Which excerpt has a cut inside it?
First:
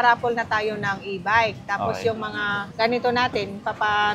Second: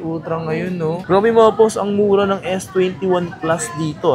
second; 1 cut; at 1.0 s

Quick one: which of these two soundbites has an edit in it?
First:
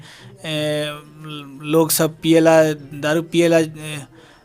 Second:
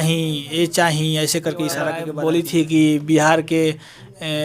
second; 1 cut; at 2.0 s

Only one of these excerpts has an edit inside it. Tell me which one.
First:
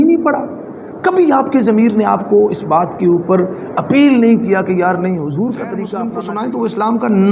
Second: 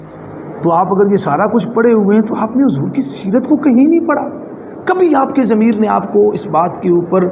first; 1 cut; at 6.1 s

